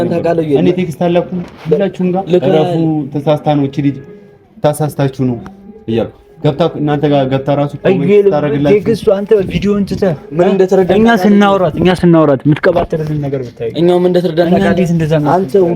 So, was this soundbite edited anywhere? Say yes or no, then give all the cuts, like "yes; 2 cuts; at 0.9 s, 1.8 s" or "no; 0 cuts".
no; 0 cuts